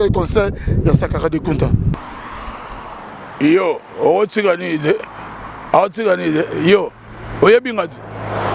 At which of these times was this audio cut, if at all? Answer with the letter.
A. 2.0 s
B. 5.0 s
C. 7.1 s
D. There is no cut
A